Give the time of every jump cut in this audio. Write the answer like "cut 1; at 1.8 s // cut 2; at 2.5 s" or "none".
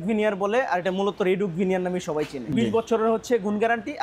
cut 1; at 2.5 s